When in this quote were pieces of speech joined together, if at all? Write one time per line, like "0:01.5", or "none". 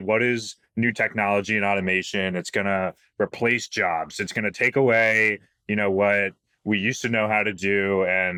none

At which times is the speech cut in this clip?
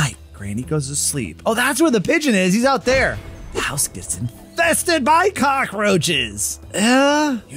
none

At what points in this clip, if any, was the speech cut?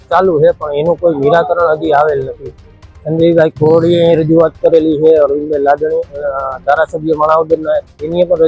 none

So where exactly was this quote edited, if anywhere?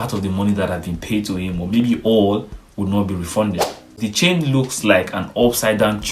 0:04.0

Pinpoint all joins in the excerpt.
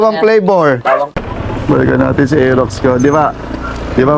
0:01.2

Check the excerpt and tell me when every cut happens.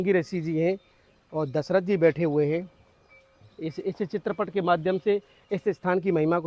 none

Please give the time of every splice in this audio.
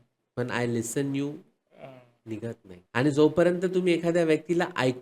0:02.7

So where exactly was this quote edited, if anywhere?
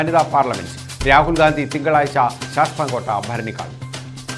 none

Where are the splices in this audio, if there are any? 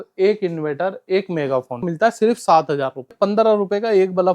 0:01.9
0:03.1

